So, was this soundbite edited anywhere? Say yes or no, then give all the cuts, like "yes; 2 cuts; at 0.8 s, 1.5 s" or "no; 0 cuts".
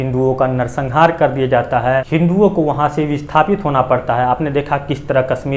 yes; 1 cut; at 2.1 s